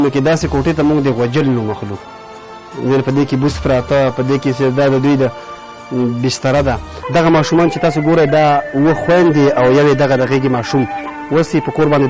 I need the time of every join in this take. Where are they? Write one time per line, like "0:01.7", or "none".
0:06.9